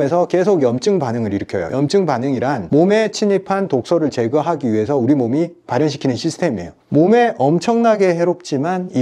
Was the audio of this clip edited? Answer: yes; 1 cut; at 6.8 s

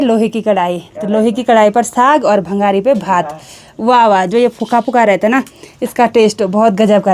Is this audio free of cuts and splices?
yes; 0 cuts

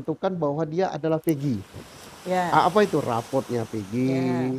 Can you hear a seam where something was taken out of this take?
no; 0 cuts

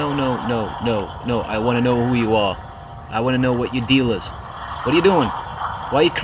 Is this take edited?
no; 0 cuts

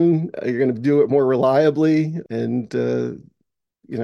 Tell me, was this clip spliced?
yes; 1 cut; at 2.2 s

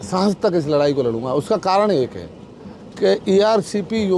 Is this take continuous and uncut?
yes; 0 cuts

